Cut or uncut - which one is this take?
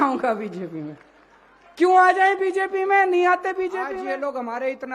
cut